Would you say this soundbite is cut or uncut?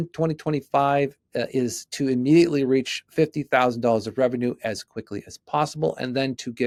uncut